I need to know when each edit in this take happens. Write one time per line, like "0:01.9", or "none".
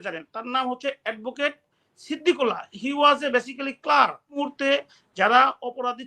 0:04.4